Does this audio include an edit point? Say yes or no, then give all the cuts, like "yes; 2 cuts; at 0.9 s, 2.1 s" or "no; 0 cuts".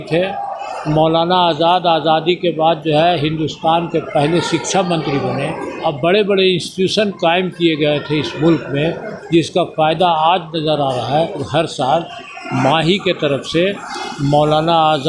yes; 2 cuts; at 5.7 s, 11.4 s